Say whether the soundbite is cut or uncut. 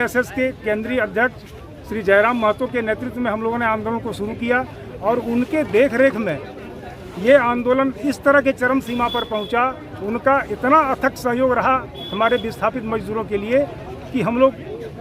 uncut